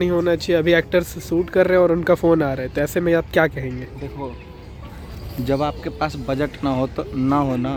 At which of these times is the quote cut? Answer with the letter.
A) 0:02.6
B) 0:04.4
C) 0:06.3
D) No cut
D